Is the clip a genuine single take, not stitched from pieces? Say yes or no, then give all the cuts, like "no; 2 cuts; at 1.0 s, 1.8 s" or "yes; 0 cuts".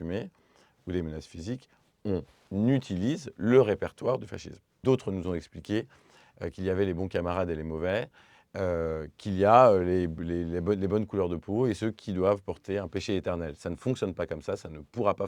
no; 1 cut; at 4.8 s